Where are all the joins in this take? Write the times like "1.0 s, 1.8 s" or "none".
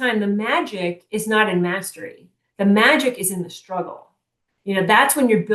none